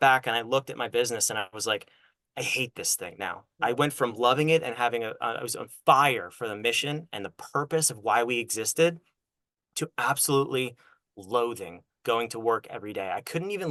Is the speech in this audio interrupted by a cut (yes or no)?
no